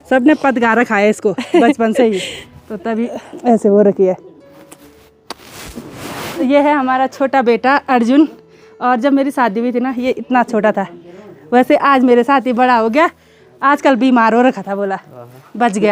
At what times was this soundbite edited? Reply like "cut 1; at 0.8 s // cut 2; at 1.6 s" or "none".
none